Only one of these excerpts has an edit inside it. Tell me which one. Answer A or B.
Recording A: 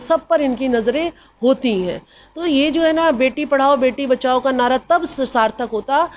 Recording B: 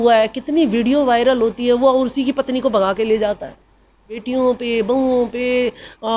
B